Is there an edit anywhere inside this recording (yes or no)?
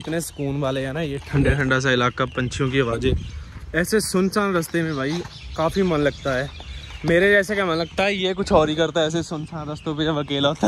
no